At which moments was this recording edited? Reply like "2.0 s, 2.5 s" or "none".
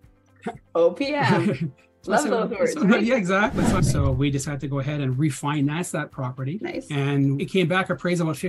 3.8 s, 6.6 s, 7.4 s